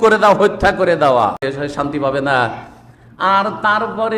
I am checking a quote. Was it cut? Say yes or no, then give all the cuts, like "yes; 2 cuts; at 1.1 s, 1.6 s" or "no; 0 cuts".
yes; 1 cut; at 1.4 s